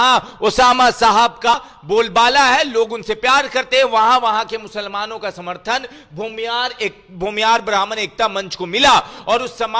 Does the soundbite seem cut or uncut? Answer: cut